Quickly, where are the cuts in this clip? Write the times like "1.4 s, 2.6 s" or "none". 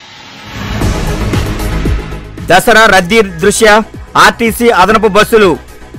2.0 s